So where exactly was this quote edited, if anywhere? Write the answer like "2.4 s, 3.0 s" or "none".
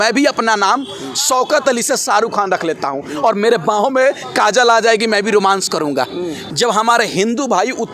6.4 s